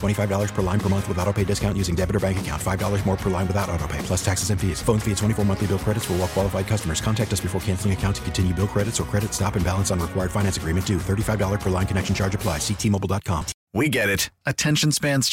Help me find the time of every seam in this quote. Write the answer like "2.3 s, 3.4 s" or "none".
13.6 s

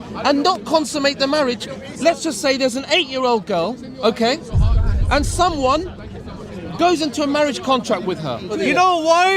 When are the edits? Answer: 8.5 s

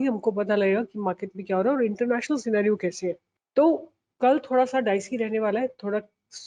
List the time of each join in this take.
none

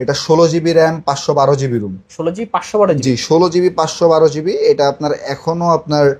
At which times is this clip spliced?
none

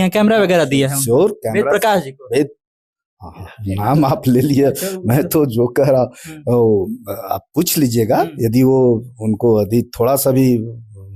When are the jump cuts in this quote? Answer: none

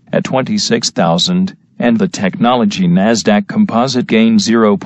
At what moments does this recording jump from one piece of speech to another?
2.4 s

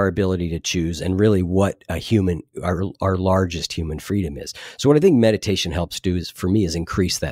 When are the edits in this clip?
none

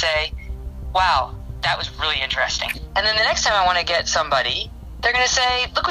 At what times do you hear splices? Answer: 2.8 s

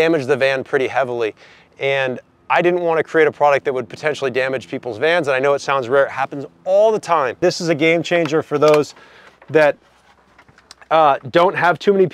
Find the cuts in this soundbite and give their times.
7.4 s

